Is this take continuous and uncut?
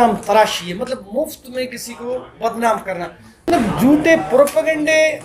no; 1 cut; at 3.5 s

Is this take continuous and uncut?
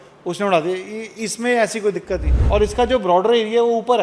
no; 1 cut; at 2.3 s

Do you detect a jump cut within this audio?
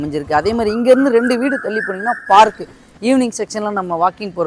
no; 0 cuts

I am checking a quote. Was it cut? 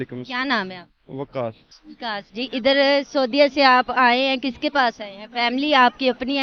no; 0 cuts

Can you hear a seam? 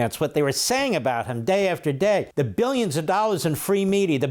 yes; 1 cut; at 2.3 s

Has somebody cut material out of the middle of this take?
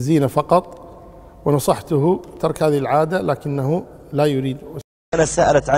yes; 1 cut; at 4.7 s

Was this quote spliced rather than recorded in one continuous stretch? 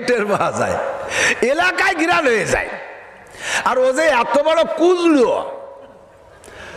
no; 0 cuts

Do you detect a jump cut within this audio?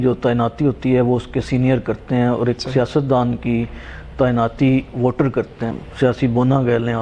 yes; 1 cut; at 5.8 s

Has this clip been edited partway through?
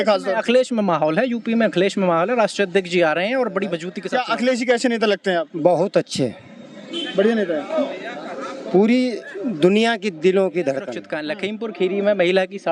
yes; 2 cuts; at 3.9 s, 11.2 s

